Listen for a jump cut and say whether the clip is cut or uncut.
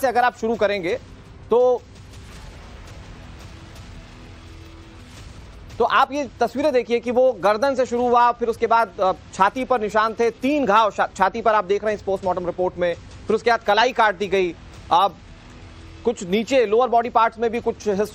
uncut